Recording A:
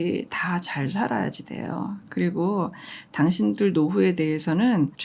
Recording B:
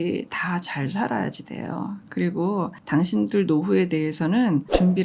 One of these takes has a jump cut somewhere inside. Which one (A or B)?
B